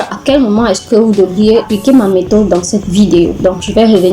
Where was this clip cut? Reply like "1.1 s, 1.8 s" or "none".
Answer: 1.6 s